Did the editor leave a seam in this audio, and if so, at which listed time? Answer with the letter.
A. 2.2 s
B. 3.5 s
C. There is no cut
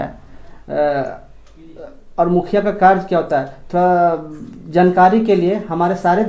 C